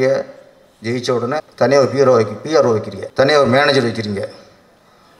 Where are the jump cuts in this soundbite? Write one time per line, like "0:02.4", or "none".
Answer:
0:01.5
0:03.0